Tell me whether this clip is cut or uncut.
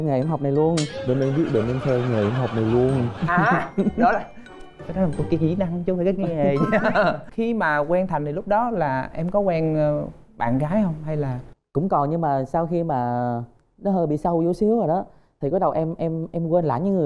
uncut